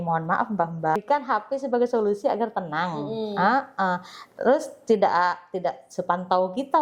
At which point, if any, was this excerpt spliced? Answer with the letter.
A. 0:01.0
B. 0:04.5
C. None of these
A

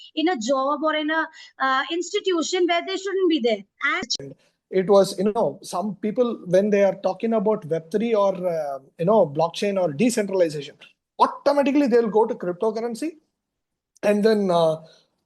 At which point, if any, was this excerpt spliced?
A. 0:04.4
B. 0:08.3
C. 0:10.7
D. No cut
A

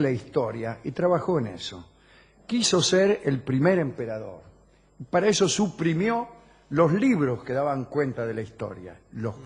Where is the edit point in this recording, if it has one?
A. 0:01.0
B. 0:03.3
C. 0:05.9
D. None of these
D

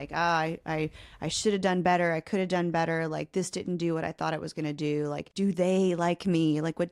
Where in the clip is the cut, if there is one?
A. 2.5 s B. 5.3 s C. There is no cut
B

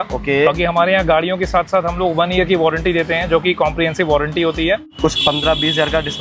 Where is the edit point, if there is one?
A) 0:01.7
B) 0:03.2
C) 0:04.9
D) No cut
C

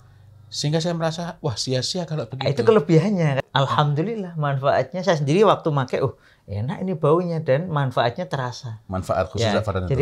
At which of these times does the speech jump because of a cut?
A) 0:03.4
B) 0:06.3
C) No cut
A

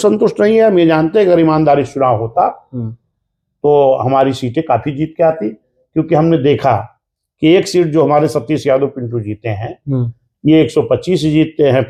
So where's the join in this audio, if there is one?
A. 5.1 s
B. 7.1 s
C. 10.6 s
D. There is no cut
D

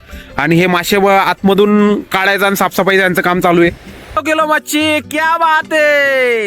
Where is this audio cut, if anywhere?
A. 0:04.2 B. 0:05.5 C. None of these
A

